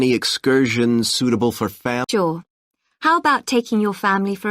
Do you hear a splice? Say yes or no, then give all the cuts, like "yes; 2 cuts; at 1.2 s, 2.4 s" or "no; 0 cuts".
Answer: yes; 1 cut; at 2.0 s